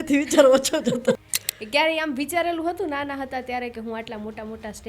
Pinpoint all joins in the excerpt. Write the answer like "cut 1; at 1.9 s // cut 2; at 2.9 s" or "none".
cut 1; at 1.2 s